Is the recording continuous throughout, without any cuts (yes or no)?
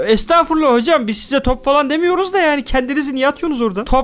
yes